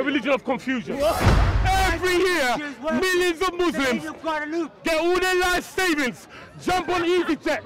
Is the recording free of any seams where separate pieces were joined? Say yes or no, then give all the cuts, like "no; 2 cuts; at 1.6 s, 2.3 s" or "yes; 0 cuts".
no; 1 cut; at 1.3 s